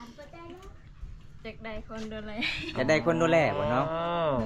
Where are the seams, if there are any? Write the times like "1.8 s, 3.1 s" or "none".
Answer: none